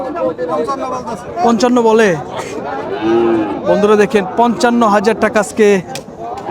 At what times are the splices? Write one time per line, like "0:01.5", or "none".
none